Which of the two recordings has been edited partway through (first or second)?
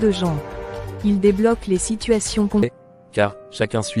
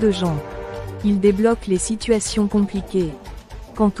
first